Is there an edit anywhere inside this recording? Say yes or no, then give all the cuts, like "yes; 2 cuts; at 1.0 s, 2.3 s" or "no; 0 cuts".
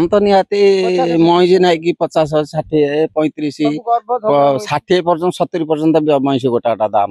no; 0 cuts